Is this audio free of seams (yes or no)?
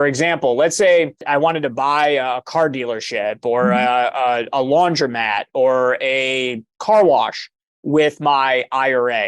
no